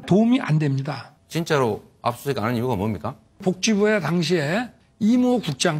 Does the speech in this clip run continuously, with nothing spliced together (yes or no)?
yes